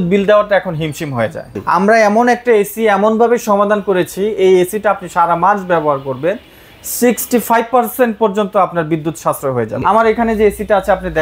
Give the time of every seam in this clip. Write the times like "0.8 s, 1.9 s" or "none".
1.5 s, 9.8 s